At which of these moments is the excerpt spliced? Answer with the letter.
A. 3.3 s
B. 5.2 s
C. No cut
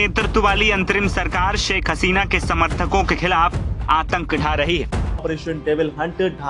B